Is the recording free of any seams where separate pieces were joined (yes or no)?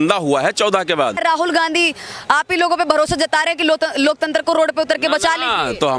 no